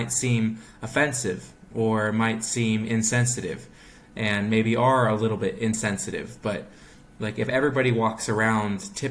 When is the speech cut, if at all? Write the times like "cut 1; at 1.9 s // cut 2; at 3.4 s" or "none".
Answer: none